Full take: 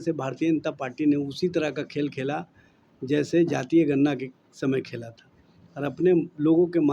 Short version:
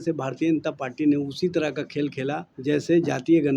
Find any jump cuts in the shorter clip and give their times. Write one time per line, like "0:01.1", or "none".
0:02.5